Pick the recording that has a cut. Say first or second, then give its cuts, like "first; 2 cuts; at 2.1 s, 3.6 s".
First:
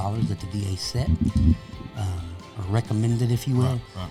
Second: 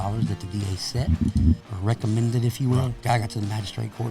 second; 2 cuts; at 1.7 s, 3.0 s